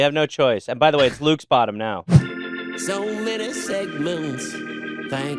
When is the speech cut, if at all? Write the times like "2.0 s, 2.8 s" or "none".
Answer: 2.1 s

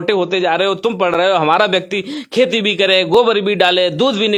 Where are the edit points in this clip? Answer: none

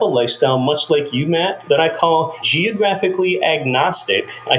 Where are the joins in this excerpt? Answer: 1.6 s, 2.4 s

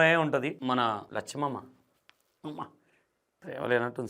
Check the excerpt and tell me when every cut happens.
0.9 s

